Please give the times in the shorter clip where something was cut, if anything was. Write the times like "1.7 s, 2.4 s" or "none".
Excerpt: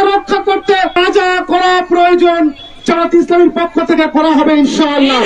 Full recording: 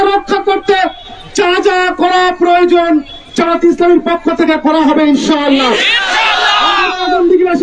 1.0 s

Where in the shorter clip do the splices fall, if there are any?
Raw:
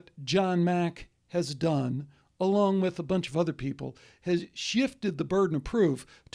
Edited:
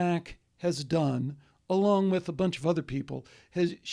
none

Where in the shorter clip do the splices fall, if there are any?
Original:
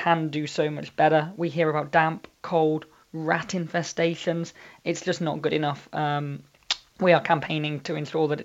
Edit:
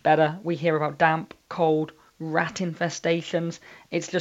none

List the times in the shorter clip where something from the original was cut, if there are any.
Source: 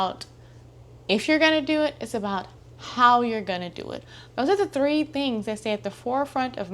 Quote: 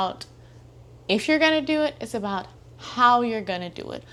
none

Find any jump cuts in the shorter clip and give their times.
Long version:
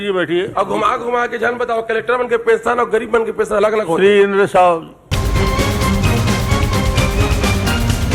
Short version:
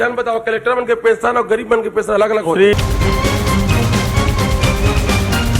2.7 s

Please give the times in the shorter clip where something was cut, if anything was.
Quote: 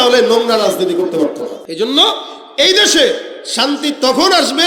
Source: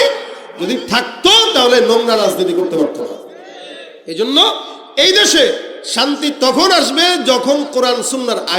1.6 s

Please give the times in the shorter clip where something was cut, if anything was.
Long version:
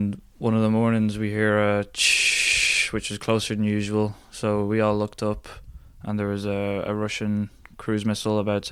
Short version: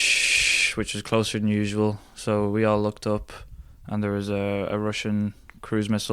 none

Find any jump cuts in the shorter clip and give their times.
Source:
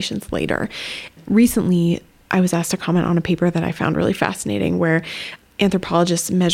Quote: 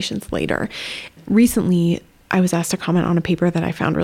none

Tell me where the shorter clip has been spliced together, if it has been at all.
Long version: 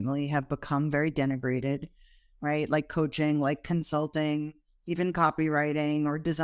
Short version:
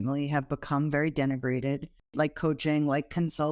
2.1 s

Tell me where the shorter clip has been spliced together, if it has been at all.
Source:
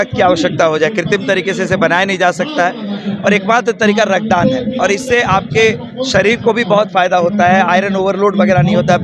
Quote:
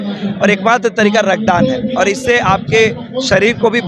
none

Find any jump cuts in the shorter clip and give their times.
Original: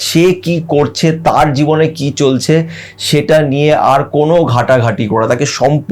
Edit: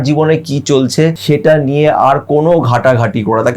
1.2 s

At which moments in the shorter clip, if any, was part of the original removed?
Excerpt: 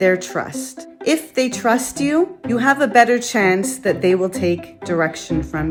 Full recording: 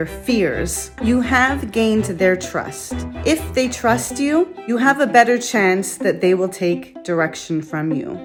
none

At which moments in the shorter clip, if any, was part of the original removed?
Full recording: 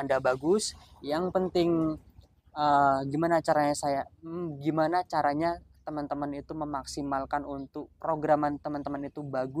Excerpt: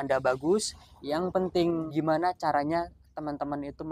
1.9 s

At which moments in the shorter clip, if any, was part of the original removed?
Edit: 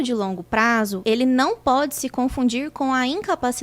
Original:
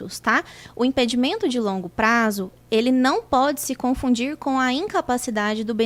1.0 s

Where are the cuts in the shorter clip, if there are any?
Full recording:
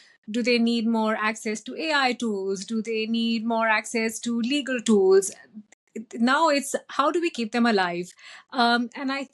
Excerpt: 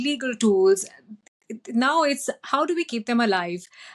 none

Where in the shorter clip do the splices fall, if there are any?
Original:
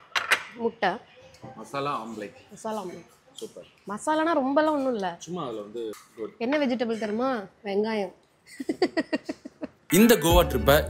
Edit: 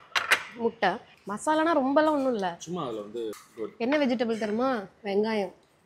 1.1 s

